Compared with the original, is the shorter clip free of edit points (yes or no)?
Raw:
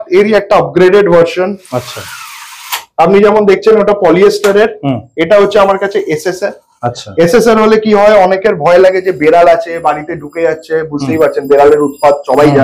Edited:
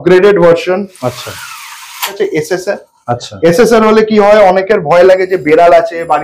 no